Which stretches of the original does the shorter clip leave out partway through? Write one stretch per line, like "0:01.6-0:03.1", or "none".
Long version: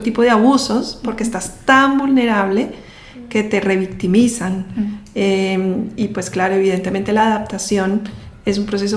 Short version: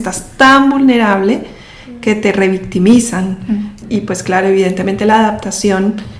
0:05.1-0:05.9